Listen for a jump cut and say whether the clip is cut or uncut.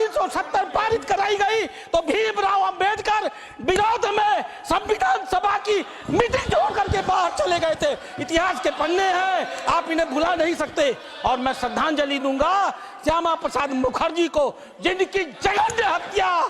uncut